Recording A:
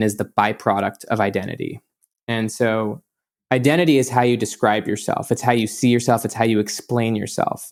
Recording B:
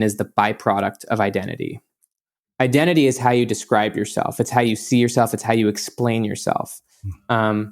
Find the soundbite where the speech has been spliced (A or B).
B